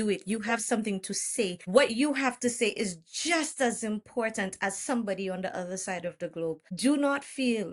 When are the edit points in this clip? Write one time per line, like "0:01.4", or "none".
0:01.6
0:06.7